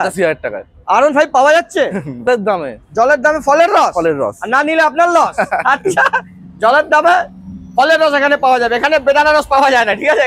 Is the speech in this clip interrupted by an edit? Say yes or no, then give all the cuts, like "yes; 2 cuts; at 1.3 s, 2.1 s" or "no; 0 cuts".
yes; 1 cut; at 2.3 s